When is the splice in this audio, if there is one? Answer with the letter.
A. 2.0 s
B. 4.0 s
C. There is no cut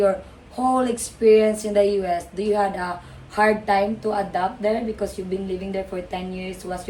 C